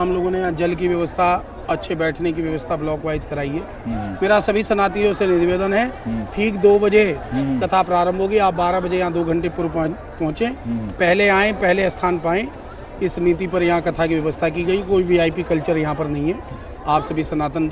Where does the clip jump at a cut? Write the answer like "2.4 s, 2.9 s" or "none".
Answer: none